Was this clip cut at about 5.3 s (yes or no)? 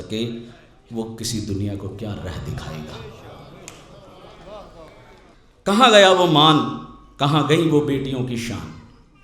yes